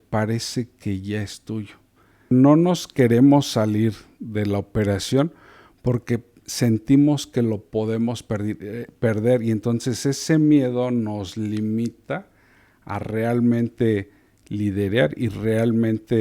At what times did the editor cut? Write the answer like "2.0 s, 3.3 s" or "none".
2.3 s